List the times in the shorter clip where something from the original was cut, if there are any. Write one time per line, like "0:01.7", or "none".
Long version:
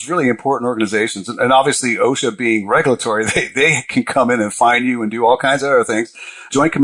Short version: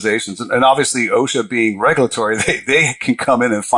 none